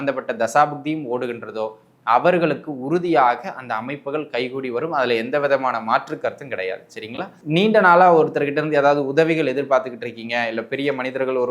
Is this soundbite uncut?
no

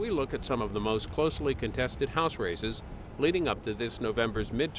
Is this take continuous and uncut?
yes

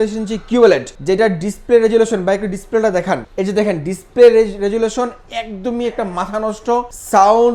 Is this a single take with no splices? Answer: yes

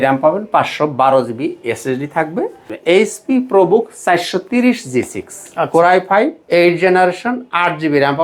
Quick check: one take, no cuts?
no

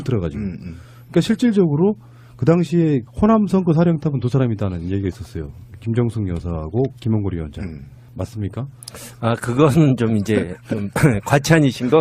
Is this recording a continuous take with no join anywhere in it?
yes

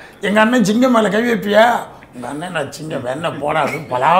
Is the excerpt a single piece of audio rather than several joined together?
yes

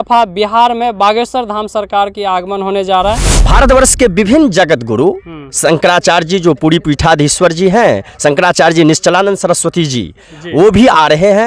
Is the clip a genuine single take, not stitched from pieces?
no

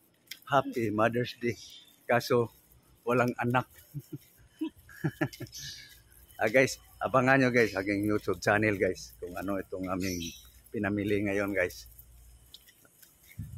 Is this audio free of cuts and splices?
yes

